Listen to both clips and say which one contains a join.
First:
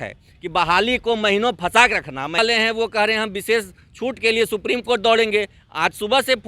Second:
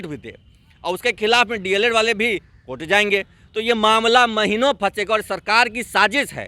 first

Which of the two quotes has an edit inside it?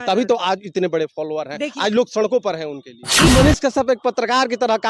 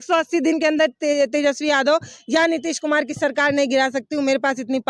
first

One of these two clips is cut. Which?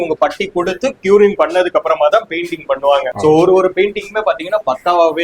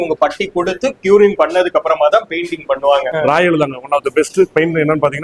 second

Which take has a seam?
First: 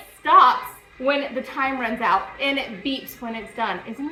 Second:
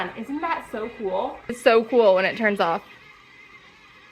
second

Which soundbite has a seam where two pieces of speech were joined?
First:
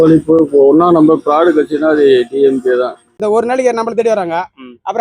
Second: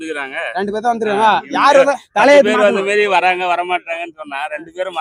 first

